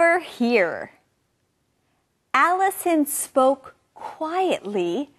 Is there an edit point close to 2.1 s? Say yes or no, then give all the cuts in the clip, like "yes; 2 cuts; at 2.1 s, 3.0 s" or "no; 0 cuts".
no; 0 cuts